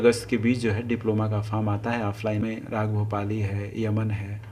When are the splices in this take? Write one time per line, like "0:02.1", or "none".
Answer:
0:02.4